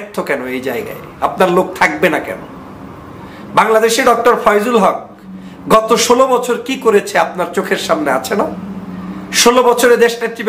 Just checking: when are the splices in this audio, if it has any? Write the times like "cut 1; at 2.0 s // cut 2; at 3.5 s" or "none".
none